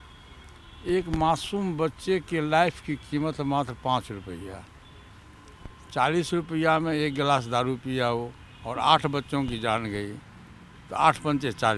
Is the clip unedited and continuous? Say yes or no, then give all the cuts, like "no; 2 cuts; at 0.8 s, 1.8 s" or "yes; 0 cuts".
yes; 0 cuts